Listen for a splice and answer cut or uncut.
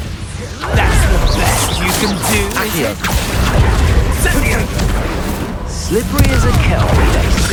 uncut